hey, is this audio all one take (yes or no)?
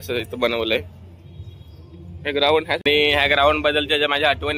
no